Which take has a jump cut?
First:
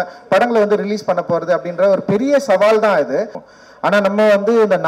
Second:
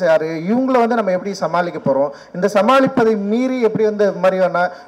first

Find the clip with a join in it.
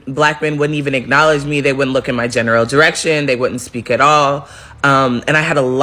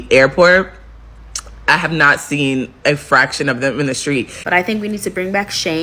second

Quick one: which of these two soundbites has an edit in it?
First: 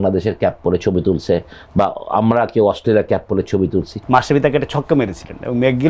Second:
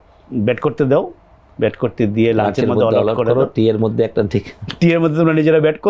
first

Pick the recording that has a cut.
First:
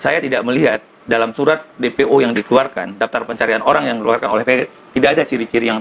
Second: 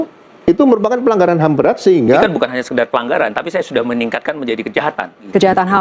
second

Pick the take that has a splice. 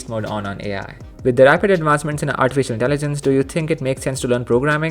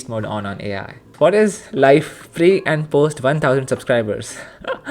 second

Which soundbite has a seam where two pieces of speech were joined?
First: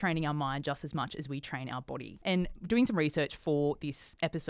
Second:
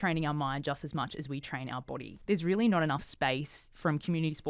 second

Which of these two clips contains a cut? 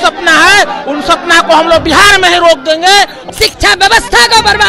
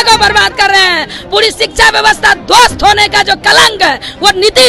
first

